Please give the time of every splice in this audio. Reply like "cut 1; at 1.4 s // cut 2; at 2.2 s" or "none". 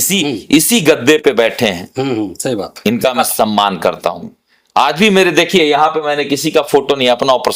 none